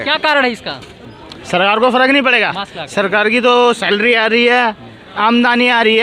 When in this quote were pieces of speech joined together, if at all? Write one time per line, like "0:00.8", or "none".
0:00.9